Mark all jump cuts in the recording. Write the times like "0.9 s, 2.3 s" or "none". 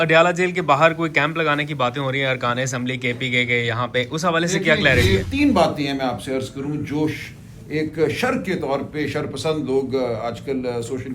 5.2 s